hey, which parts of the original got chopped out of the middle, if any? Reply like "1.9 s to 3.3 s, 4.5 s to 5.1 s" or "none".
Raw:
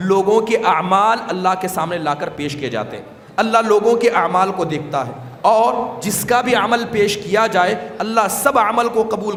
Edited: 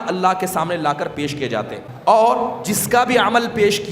3.1 s to 5.2 s